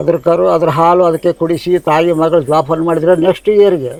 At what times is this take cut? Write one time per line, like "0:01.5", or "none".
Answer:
none